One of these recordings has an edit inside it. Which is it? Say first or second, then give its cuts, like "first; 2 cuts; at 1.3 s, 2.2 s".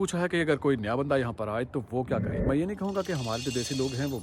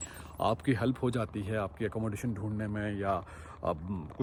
first; 1 cut; at 2.4 s